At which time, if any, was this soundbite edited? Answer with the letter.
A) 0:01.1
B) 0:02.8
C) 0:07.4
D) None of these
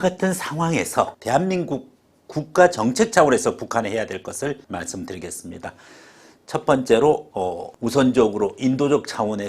A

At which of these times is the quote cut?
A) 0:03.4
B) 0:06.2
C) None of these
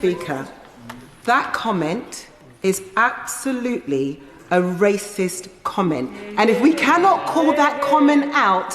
C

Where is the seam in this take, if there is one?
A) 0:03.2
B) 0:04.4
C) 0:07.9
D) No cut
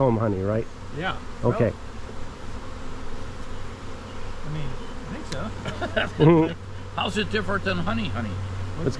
D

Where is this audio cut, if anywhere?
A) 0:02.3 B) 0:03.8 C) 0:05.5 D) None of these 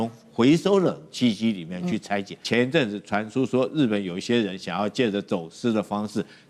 A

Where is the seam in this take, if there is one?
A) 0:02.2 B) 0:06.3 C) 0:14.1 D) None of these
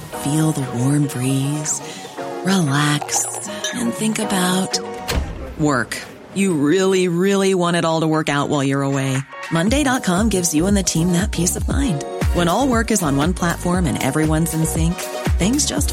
D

